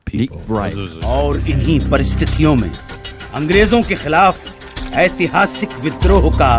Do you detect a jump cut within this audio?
yes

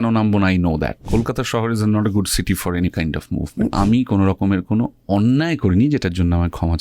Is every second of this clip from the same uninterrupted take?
no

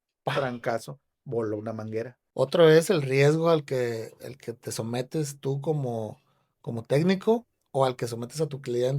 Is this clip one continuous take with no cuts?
no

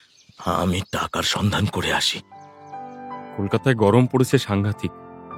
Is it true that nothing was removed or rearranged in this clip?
no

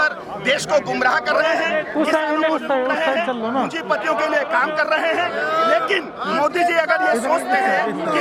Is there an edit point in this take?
no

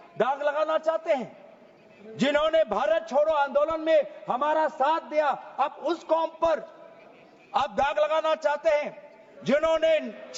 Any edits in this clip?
no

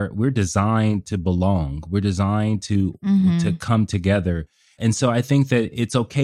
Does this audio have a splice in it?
yes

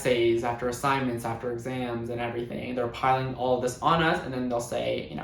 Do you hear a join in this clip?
no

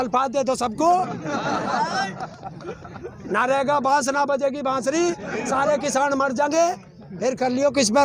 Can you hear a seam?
no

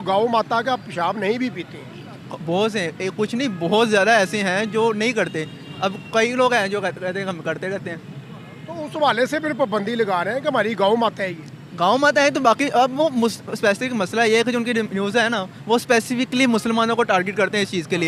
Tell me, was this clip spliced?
no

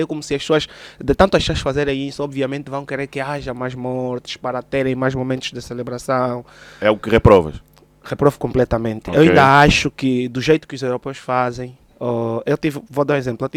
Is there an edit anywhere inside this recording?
no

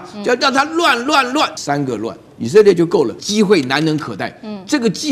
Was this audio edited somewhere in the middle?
yes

